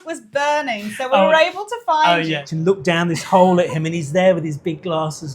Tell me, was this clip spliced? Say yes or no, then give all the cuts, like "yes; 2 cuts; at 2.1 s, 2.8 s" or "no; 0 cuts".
yes; 1 cut; at 2.4 s